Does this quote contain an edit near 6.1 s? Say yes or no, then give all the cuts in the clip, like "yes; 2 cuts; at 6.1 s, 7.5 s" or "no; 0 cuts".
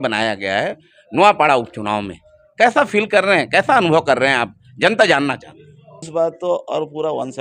yes; 1 cut; at 6.1 s